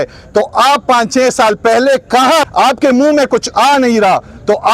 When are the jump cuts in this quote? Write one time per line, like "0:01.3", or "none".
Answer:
0:02.5